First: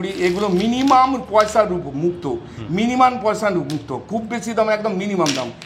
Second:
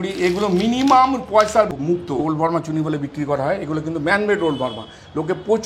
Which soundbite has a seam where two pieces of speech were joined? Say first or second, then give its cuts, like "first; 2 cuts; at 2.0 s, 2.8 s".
second; 1 cut; at 2.1 s